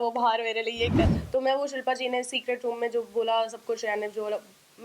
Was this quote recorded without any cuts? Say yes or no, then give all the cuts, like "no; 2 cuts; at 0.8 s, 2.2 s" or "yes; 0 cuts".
no; 1 cut; at 1.0 s